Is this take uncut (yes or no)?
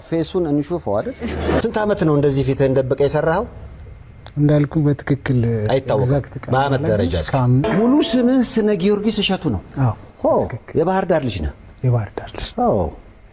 no